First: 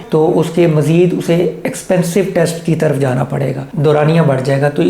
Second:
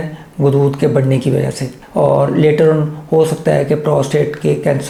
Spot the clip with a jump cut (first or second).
first